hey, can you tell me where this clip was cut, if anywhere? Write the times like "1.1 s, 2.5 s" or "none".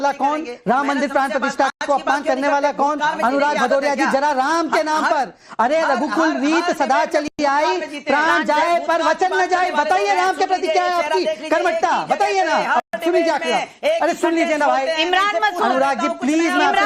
none